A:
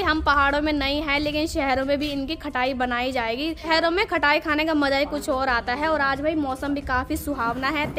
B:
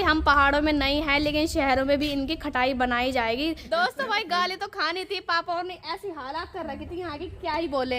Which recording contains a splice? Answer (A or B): B